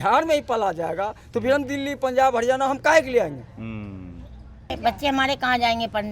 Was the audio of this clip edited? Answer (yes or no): yes